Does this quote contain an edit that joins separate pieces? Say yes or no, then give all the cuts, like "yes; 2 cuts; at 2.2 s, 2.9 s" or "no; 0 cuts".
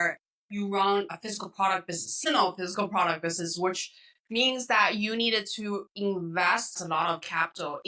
yes; 2 cuts; at 1.1 s, 6.8 s